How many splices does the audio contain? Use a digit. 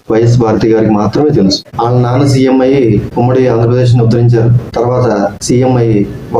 1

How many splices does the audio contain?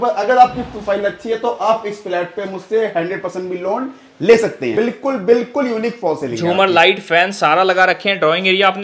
1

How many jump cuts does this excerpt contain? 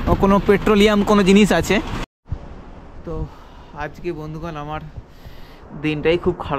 1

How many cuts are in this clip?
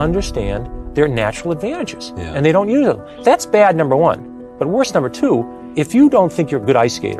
2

